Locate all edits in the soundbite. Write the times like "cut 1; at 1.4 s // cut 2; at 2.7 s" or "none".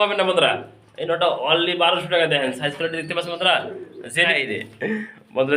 cut 1; at 4.3 s